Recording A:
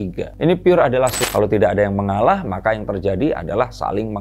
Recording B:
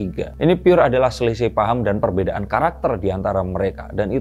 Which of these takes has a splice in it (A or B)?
A